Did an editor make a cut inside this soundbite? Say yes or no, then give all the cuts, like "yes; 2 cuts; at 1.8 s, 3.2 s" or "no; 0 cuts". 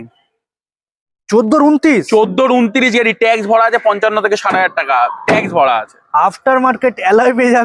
no; 0 cuts